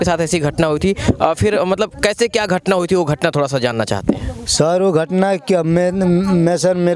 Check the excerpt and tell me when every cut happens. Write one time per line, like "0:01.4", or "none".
none